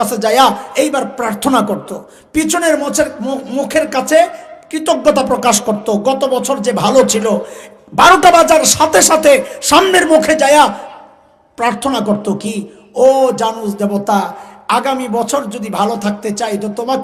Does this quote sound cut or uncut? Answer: uncut